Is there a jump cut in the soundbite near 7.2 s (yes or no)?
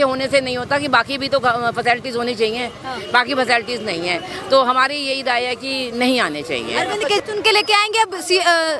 yes